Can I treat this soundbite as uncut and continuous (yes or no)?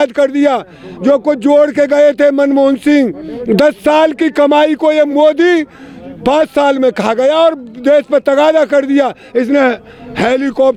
yes